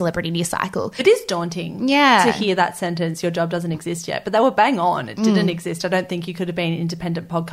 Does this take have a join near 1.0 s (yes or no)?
yes